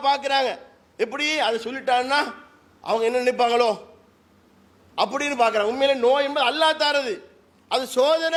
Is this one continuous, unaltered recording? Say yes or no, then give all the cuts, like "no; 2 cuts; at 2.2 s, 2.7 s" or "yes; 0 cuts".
yes; 0 cuts